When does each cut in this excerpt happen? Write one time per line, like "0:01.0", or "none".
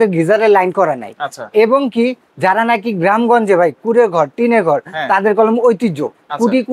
none